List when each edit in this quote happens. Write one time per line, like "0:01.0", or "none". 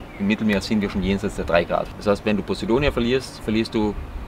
0:01.9

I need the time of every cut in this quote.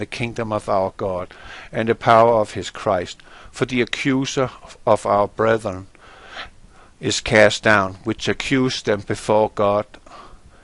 none

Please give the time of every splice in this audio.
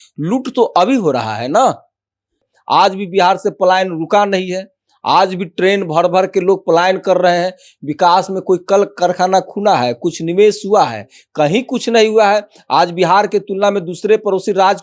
0:02.5

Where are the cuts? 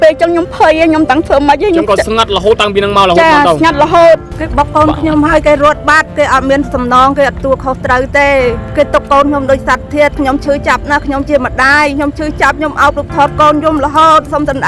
0:04.4
0:08.6

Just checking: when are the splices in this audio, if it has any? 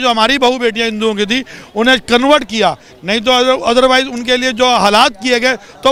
none

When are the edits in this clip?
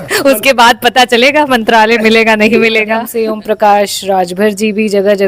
0:03.1

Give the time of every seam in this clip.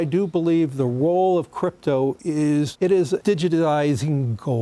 0:02.6

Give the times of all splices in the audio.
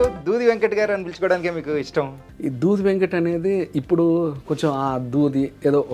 0:02.2

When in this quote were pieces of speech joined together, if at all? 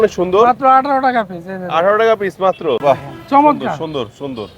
0:02.8

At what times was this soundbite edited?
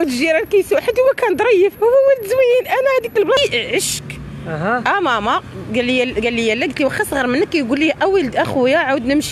0:03.4

